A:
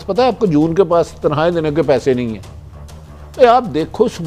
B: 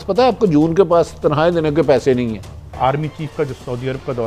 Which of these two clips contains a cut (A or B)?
B